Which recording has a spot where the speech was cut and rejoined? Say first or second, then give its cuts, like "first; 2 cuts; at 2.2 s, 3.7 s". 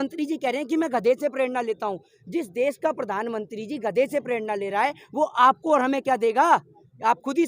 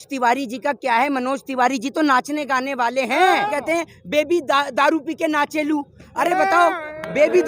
second; 1 cut; at 3.5 s